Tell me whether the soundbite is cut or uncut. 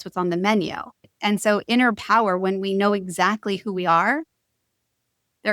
cut